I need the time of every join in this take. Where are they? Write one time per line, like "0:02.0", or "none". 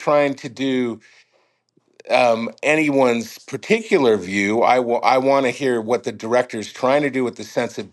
none